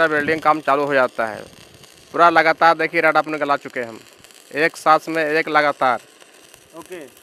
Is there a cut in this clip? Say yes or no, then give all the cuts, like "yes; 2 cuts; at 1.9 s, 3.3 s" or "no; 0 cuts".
no; 0 cuts